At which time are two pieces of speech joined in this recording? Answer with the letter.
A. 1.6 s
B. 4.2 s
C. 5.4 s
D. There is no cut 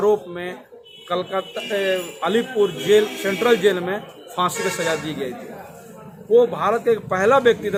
D